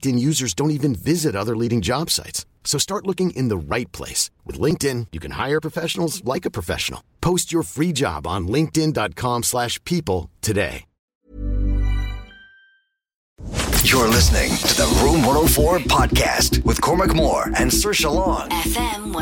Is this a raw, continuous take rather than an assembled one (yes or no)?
no